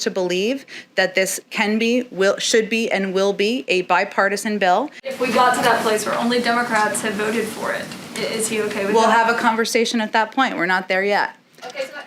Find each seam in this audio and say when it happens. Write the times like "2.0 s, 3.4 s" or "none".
5.0 s